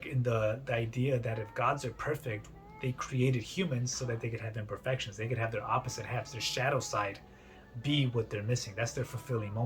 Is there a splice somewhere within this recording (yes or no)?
no